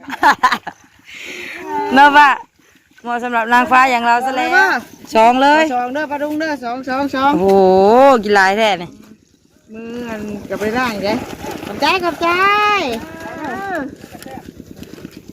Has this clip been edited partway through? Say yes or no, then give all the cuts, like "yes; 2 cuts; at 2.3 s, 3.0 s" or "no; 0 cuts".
yes; 1 cut; at 4.5 s